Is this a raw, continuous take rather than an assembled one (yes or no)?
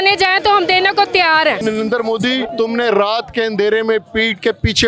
no